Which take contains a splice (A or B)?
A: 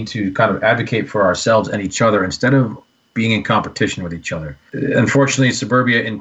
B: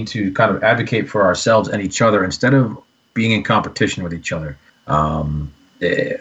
A